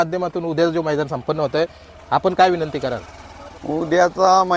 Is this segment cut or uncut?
uncut